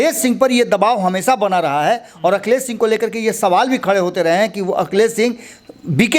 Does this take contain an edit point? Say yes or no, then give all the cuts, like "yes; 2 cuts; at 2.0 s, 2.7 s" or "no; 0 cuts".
no; 0 cuts